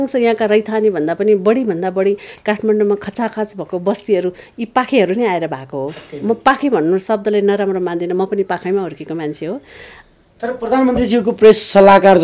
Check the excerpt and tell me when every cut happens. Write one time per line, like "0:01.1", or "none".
none